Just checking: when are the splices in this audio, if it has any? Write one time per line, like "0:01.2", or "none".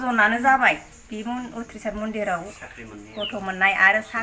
none